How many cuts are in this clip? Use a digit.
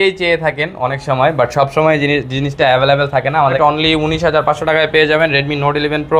1